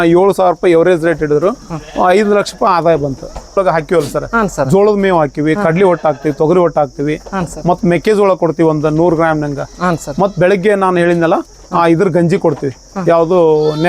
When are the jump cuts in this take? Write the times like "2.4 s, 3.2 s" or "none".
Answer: 3.6 s